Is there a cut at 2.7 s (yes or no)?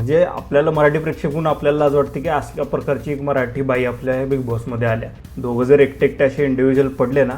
no